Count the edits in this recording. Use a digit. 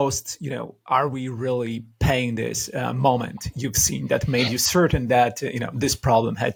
0